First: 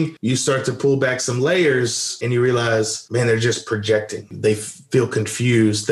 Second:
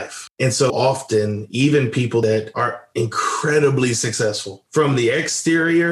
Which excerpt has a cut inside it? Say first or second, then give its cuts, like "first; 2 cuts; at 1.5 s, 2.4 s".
second; 1 cut; at 2.2 s